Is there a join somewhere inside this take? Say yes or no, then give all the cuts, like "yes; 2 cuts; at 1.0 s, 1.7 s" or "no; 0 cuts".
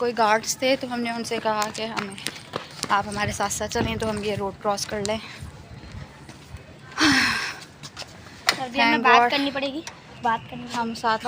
no; 0 cuts